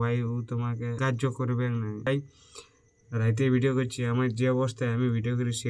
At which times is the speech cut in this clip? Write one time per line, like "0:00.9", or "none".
0:01.0
0:02.1